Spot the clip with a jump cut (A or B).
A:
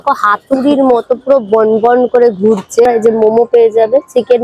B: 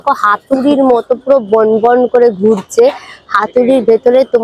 A